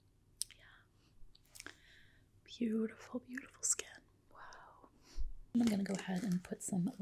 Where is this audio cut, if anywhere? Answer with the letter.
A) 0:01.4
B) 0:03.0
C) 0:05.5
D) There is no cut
C